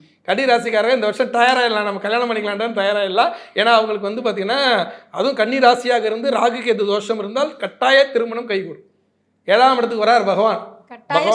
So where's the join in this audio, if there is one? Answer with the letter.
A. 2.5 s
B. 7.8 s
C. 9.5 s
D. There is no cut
D